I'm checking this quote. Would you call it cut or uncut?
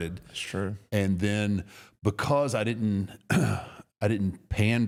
uncut